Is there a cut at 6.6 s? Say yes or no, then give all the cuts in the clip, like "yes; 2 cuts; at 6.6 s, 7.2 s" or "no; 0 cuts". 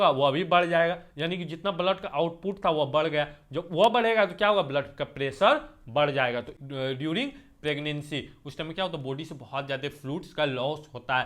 yes; 1 cut; at 6.6 s